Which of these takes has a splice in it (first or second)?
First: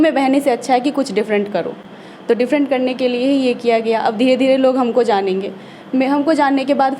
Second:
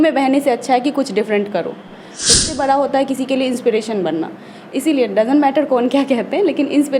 second